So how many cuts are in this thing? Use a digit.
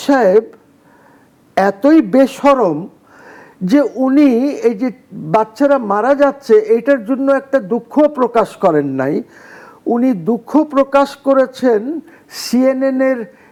0